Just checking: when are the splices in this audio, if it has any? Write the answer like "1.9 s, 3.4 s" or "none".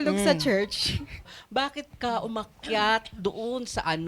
1.4 s

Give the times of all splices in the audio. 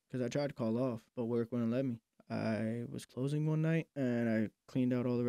1.1 s, 2.1 s, 3.9 s

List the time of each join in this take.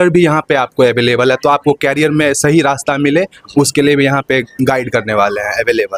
none

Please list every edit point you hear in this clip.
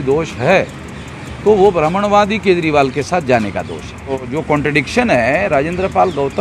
4.2 s

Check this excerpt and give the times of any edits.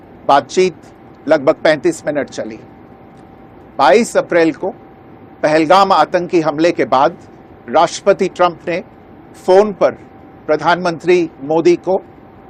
none

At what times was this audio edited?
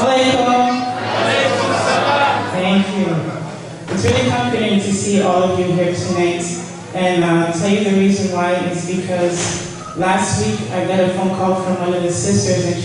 none

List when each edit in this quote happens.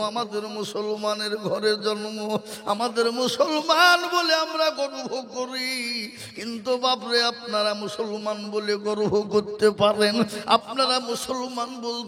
none

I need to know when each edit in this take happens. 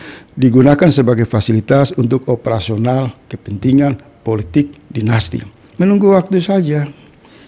5.7 s

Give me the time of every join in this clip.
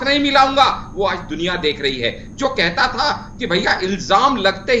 none

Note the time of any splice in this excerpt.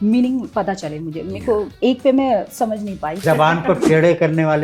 3.2 s

